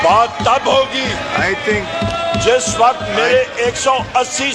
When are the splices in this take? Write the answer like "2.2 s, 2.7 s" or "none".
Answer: none